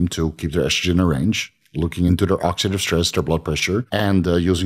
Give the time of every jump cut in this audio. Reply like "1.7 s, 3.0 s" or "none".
2.1 s, 3.9 s